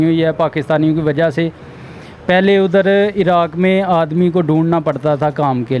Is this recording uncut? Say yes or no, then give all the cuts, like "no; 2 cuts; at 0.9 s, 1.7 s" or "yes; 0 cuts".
yes; 0 cuts